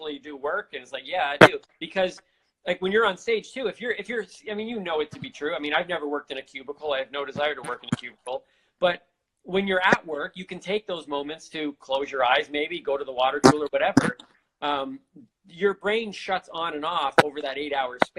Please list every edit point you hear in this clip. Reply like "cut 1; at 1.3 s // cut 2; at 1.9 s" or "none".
none